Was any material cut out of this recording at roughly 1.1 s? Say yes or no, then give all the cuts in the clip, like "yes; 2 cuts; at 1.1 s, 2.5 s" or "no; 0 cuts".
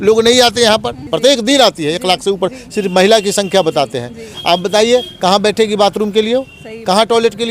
yes; 1 cut; at 1.1 s